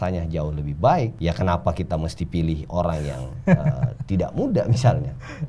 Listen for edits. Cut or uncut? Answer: cut